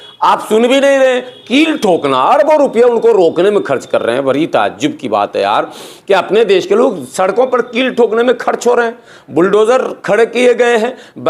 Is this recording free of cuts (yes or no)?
yes